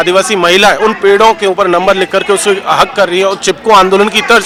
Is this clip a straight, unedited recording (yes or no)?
yes